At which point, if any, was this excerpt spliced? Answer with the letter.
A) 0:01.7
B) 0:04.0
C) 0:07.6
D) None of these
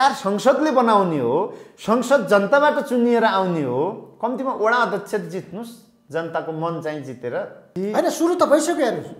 C